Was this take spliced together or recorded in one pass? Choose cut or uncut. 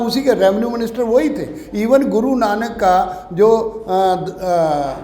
uncut